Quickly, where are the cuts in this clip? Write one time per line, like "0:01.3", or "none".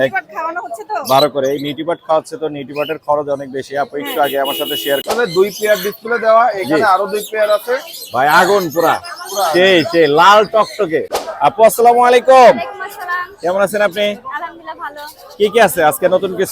0:05.0
0:11.1